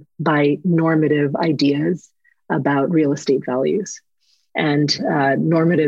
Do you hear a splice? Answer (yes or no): no